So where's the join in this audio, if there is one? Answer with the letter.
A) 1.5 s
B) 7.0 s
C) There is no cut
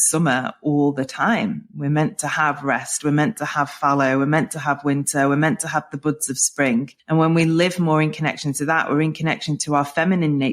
B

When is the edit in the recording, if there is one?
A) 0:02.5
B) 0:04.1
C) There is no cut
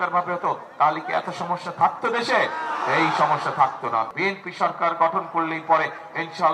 B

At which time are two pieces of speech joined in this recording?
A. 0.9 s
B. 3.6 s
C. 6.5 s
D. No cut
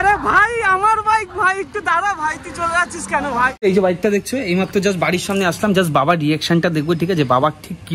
B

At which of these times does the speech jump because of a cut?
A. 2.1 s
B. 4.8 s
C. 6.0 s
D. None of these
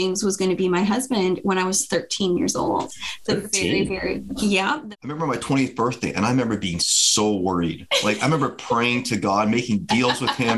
B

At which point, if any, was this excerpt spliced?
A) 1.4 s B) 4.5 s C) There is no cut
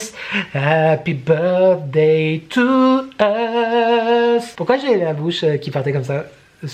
B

